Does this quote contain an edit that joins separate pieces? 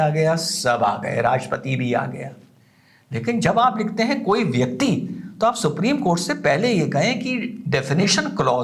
no; 0 cuts

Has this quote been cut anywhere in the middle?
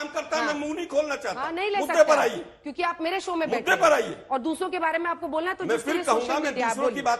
no; 0 cuts

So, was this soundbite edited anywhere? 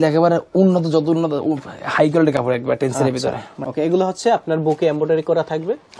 yes; 1 cut; at 3.5 s

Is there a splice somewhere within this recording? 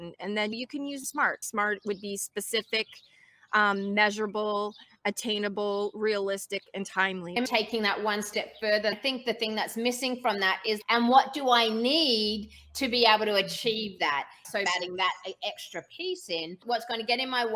yes; 6 cuts; at 1.0 s, 7.4 s, 8.9 s, 10.8 s, 14.5 s, 16.6 s

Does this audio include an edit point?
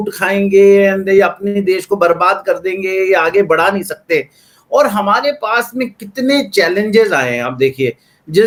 no; 0 cuts

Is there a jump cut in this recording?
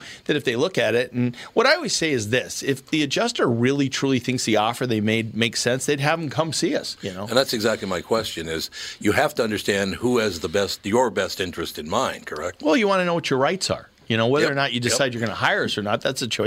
no; 0 cuts

